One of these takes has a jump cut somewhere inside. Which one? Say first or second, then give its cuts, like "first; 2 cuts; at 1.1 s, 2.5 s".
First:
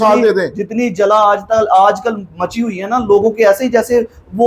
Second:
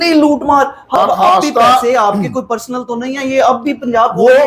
second; 1 cut; at 0.9 s